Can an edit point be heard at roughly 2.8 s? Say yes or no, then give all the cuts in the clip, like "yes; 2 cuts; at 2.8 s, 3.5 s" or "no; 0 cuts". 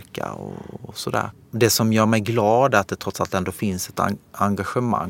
no; 1 cut; at 1.4 s